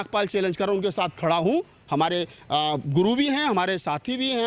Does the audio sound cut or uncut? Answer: uncut